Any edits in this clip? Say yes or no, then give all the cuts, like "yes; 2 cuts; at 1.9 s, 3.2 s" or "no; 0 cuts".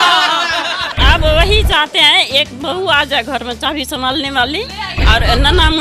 yes; 1 cut; at 0.9 s